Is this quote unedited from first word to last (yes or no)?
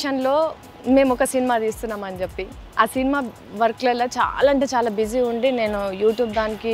yes